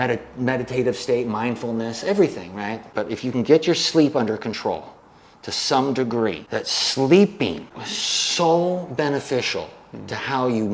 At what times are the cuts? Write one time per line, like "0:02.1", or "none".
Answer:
0:02.9

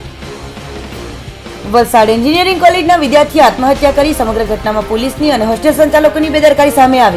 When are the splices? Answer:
0:01.3

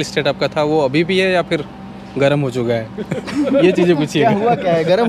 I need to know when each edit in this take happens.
none

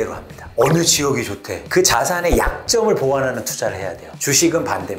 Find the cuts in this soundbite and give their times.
0:01.5
0:04.0

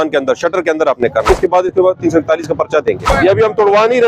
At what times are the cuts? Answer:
0:01.3
0:03.1

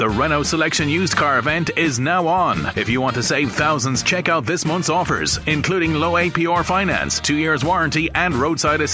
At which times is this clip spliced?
none

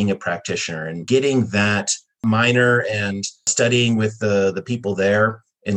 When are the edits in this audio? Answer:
0:01.0
0:02.2
0:03.5

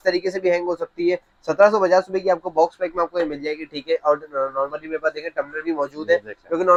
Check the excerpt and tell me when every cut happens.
none

